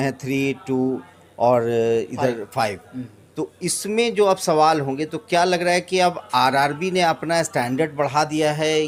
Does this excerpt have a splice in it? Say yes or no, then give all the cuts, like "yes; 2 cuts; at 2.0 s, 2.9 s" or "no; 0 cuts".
no; 0 cuts